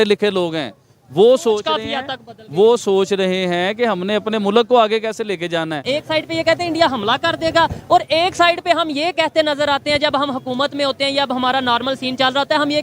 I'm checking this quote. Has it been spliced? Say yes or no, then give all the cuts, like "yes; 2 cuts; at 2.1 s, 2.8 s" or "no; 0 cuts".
yes; 1 cut; at 5.8 s